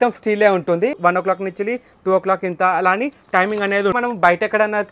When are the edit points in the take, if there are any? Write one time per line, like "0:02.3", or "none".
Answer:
0:01.0
0:04.0